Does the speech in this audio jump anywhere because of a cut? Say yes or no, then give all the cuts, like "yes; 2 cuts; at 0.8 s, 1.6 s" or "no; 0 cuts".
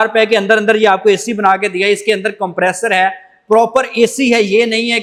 no; 0 cuts